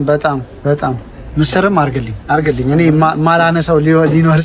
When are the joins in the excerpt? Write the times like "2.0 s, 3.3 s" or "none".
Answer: none